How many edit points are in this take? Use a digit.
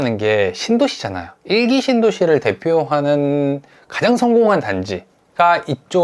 0